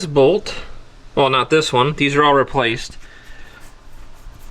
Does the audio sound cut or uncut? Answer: uncut